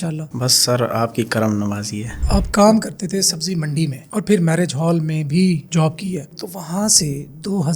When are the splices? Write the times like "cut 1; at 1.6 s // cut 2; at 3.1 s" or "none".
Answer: cut 1; at 2.2 s